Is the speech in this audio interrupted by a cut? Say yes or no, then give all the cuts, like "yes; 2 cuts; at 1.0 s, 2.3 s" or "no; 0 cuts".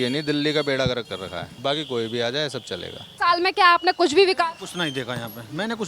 yes; 2 cuts; at 1.4 s, 3.0 s